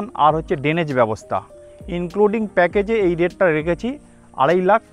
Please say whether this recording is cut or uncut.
uncut